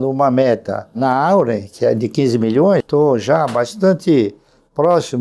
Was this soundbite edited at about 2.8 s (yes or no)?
yes